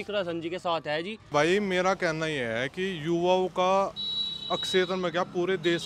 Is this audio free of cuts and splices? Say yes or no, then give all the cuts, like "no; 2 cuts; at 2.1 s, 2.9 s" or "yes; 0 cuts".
no; 1 cut; at 1.3 s